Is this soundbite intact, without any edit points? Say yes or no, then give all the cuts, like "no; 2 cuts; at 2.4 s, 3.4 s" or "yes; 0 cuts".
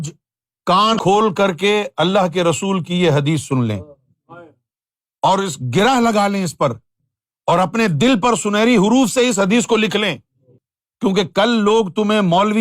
no; 1 cut; at 1.0 s